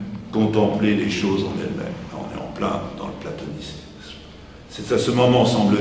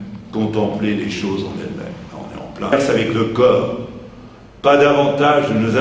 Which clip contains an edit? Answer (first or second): first